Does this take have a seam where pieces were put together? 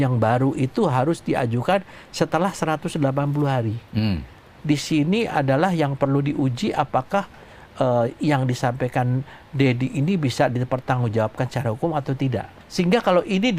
yes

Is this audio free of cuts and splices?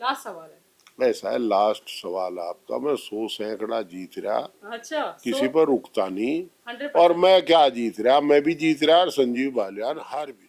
yes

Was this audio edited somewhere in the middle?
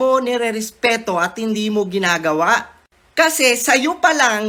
no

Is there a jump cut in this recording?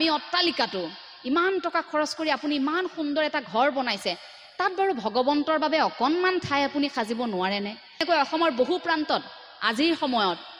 yes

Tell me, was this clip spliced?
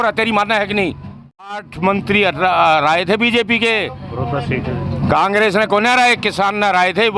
yes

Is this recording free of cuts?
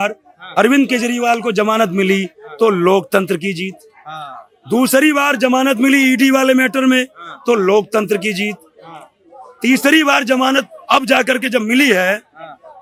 yes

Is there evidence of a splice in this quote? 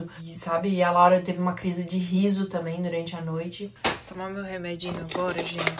yes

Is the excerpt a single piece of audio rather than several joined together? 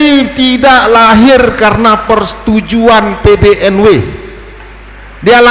yes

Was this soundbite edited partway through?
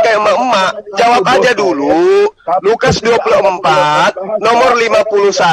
no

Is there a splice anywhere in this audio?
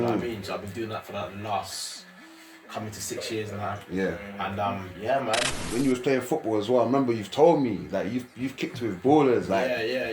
yes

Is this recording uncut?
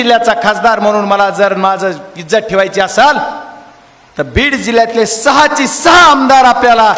yes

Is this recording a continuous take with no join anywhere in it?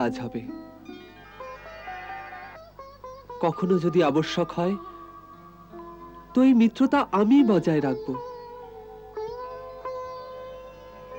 yes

